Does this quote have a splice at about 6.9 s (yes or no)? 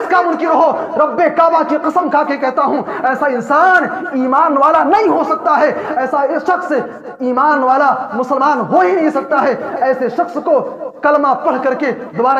no